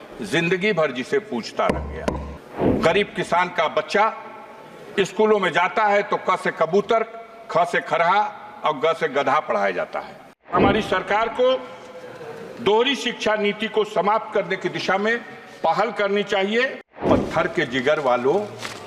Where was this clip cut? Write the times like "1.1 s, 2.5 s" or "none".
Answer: 2.3 s, 10.5 s, 17.0 s